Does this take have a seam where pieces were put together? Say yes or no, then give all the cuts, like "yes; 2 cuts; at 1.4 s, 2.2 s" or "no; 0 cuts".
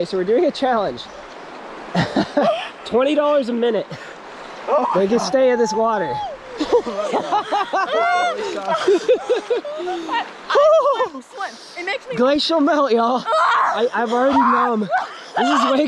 no; 0 cuts